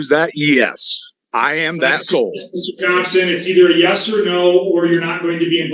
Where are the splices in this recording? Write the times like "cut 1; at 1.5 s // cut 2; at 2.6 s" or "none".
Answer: none